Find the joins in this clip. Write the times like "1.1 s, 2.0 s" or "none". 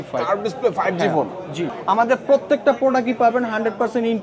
1.7 s